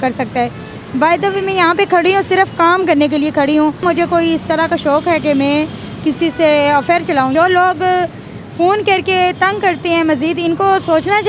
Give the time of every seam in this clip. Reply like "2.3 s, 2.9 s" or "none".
3.8 s, 7.3 s

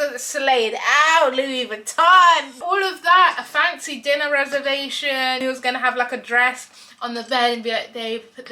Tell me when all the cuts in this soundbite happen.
2.6 s, 5.4 s

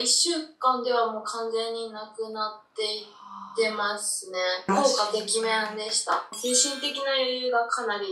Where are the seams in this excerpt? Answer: 4.7 s, 6.3 s

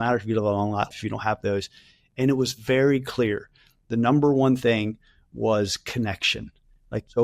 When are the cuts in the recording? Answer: 0.9 s

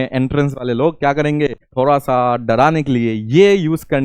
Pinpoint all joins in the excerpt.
1.6 s

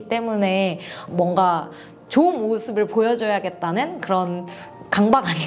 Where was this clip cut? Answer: 0.9 s

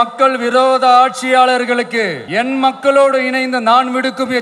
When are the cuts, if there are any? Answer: 2.2 s

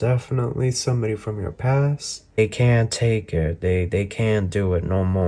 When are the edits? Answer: 2.4 s

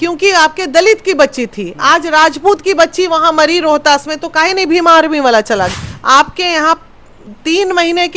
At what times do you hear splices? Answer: 5.8 s

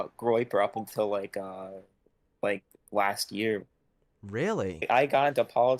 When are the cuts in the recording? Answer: 4.9 s

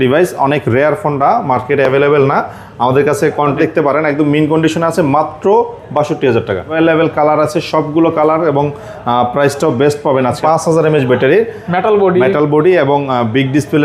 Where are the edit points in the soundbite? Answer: 3.6 s, 6.7 s, 10.4 s

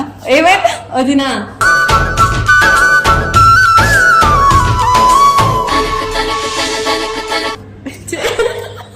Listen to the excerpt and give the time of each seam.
none

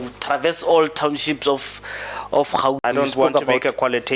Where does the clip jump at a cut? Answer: 2.8 s

